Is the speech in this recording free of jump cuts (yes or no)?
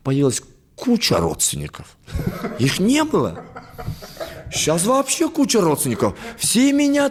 yes